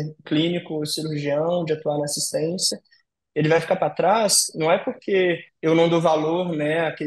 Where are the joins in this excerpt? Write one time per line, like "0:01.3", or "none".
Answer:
0:05.5